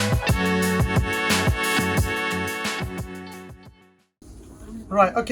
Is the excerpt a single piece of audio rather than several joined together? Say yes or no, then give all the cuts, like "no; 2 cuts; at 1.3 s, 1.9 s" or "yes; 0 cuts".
no; 1 cut; at 4.0 s